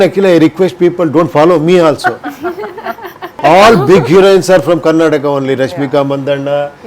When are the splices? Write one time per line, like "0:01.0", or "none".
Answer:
0:03.4